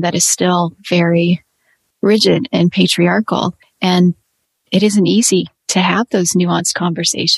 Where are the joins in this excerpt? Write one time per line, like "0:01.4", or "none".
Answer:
0:03.6